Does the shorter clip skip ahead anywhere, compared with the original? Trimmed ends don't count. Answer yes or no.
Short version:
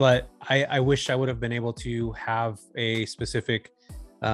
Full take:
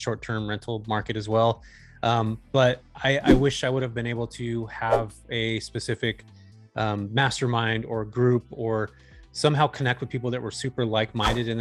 no